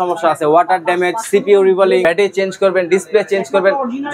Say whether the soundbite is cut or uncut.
cut